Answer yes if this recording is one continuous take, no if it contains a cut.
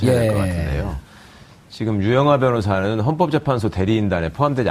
yes